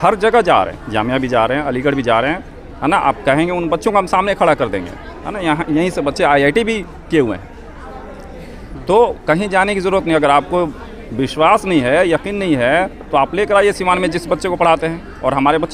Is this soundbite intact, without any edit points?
yes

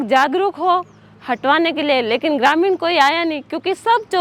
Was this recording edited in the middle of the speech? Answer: no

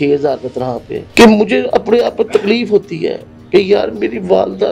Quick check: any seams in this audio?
yes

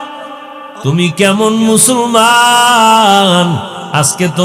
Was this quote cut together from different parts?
no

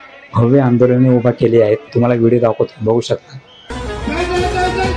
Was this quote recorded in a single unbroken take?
no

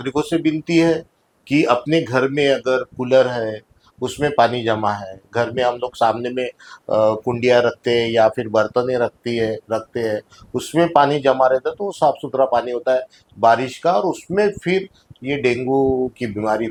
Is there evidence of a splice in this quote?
no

